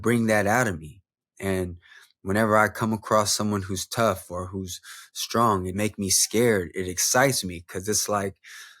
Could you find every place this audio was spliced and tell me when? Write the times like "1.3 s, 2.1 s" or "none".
5.7 s